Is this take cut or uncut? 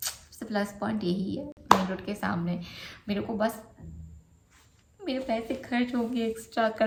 uncut